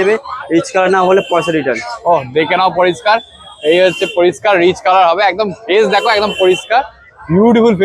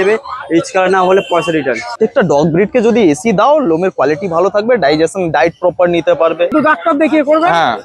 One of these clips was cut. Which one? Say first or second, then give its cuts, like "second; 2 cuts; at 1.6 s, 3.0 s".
second; 2 cuts; at 1.9 s, 6.5 s